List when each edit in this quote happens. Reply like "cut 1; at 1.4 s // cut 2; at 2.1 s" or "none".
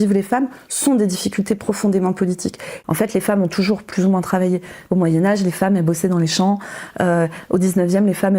cut 1; at 2.7 s // cut 2; at 4.8 s